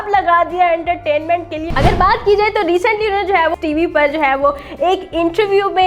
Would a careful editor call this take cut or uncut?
cut